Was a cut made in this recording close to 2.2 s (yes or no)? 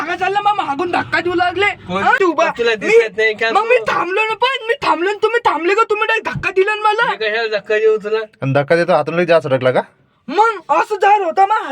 yes